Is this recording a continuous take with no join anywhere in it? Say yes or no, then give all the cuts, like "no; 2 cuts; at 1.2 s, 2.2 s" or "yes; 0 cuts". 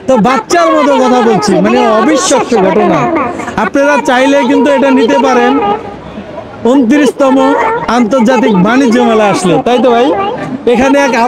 yes; 0 cuts